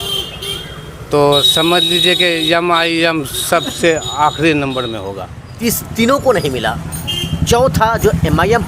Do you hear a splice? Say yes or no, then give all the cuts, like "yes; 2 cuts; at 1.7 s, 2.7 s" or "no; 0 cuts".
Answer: yes; 1 cut; at 5.5 s